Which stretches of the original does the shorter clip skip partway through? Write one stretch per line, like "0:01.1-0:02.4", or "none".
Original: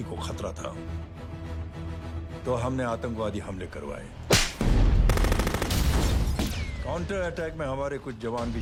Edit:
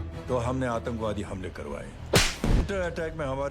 0:04.8-0:07.0